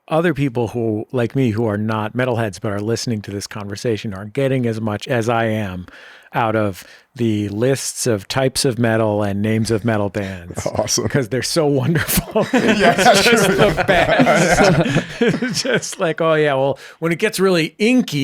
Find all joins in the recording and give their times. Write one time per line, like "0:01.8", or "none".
0:05.0
0:06.3